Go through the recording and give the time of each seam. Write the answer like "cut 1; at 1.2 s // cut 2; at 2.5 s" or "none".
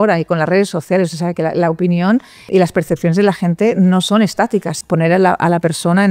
cut 1; at 2.4 s // cut 2; at 4.7 s